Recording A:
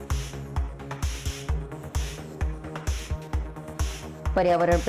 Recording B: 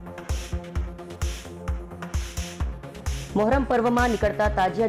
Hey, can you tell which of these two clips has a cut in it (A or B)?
B